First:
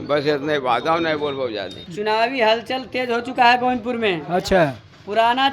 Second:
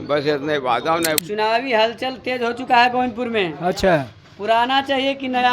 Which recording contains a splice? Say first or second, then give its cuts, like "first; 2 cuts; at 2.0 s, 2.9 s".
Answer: second; 1 cut; at 1.2 s